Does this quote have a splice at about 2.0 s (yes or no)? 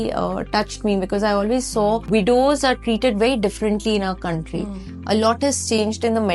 yes